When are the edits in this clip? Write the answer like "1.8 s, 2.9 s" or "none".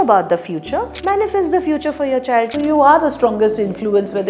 0.9 s, 2.5 s